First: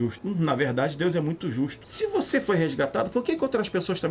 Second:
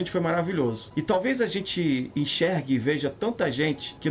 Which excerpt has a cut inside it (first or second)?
first